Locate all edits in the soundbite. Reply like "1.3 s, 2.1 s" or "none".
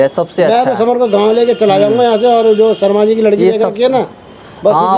none